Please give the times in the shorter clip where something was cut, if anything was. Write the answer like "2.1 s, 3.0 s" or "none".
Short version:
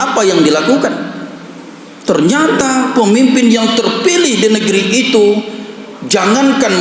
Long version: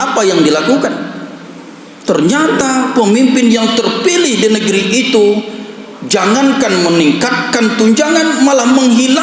none